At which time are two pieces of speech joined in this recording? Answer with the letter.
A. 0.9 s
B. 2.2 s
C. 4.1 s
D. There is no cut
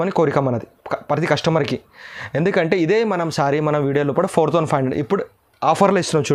D